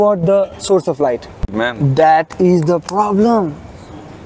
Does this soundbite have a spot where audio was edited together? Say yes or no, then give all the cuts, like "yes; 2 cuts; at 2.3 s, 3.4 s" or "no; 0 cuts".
yes; 1 cut; at 1.5 s